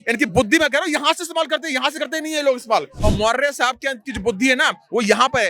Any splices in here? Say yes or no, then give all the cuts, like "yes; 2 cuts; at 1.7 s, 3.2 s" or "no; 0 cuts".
yes; 1 cut; at 2.9 s